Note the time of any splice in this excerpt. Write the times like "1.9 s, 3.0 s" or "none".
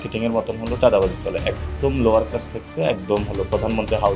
none